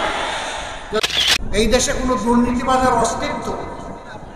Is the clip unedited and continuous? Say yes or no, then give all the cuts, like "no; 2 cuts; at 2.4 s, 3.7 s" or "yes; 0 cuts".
no; 1 cut; at 1.0 s